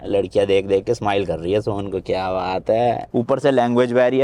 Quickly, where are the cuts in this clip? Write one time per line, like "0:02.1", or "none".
0:03.0